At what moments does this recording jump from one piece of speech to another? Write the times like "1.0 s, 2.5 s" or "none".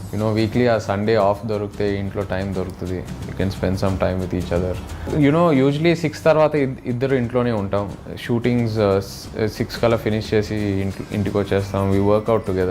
5.1 s